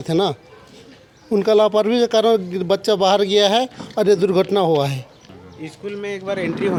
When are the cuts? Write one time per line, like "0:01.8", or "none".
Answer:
none